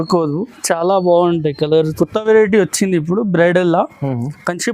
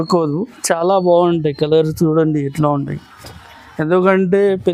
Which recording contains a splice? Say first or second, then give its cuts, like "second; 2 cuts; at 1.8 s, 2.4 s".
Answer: first; 1 cut; at 1.9 s